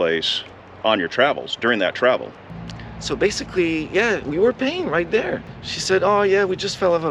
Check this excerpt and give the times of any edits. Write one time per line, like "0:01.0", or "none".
0:02.4
0:05.5